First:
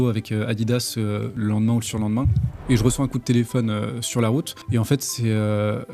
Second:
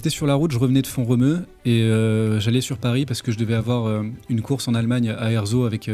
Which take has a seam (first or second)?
first